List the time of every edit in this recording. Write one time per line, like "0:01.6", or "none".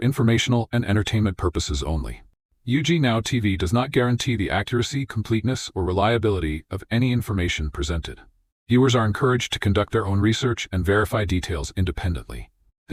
none